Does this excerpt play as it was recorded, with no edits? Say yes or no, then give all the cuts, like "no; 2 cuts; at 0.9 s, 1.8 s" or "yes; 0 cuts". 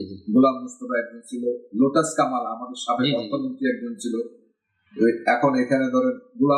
yes; 0 cuts